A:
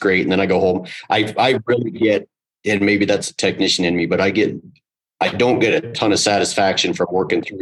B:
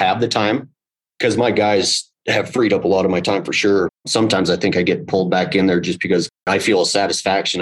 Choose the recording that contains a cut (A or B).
B